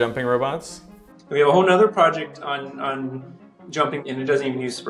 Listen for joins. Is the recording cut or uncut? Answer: cut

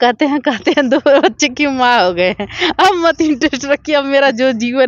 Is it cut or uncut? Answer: uncut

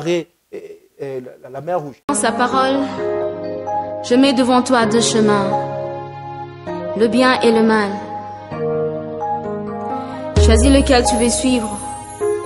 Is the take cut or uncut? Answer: cut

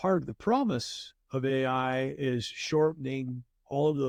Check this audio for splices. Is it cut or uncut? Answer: uncut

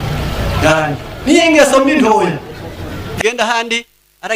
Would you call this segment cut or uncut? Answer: cut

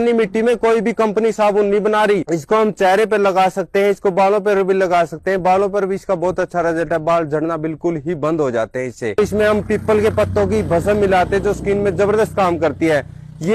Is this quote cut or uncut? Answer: cut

